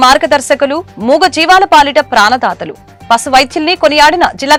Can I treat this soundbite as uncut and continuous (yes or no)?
yes